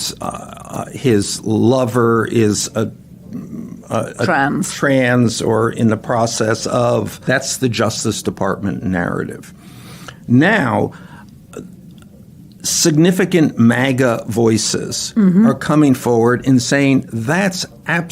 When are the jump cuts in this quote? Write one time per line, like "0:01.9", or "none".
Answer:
0:07.2